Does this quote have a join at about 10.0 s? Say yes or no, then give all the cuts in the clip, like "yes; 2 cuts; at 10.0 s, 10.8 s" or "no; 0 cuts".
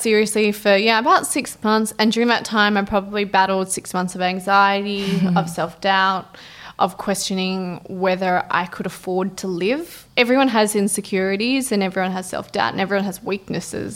yes; 1 cut; at 10.0 s